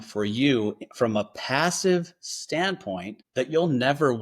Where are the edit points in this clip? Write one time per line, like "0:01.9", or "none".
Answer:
0:03.2